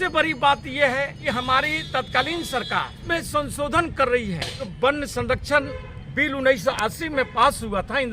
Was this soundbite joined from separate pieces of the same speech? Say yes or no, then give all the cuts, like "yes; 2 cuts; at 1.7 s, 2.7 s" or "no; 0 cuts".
yes; 3 cuts; at 1.2 s, 3.0 s, 4.6 s